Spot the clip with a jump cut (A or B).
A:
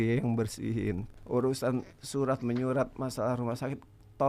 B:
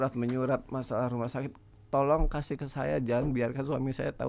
A